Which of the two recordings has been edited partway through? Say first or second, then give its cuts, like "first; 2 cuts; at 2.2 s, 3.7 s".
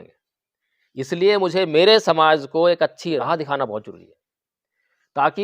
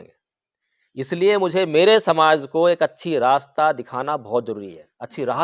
first; 1 cut; at 3.2 s